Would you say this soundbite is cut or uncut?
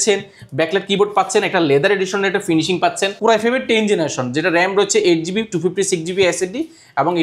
cut